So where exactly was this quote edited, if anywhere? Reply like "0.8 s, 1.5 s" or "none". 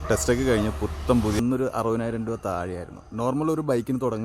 1.4 s